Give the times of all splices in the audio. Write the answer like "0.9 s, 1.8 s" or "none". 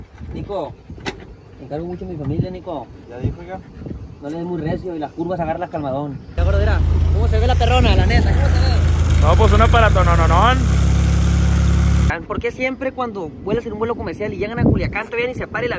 6.4 s, 12.1 s